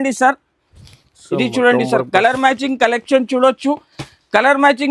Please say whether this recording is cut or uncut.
uncut